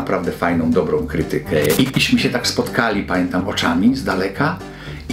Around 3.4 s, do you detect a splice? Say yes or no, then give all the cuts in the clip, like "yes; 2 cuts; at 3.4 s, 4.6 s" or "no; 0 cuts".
no; 1 cut; at 1.8 s